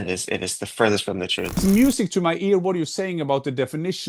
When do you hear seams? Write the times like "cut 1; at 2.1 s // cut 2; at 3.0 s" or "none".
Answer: cut 1; at 1.6 s